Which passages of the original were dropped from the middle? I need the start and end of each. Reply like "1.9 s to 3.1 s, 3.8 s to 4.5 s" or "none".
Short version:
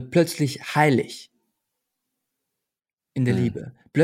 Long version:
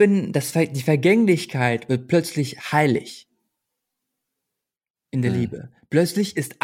none